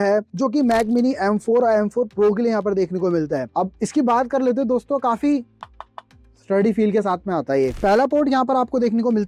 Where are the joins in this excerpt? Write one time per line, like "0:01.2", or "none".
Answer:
0:03.5
0:07.7